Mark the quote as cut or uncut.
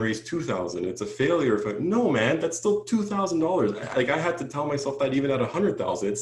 uncut